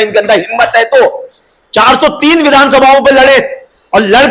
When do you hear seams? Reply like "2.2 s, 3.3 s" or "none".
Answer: none